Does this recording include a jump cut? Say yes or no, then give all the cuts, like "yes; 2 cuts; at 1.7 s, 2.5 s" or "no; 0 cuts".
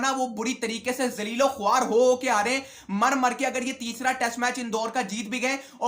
no; 0 cuts